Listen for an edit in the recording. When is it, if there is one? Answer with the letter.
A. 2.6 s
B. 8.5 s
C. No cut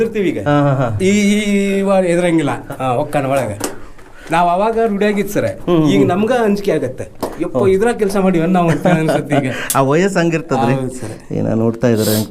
A